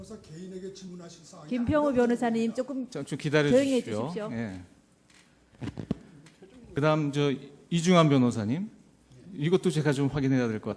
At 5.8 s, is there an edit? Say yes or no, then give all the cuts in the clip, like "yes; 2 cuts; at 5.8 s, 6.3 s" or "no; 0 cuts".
no; 1 cut; at 7.0 s